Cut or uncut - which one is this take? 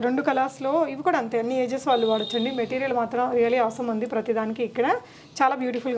uncut